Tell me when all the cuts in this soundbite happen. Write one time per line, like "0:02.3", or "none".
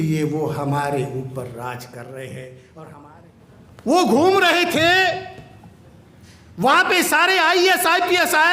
0:03.0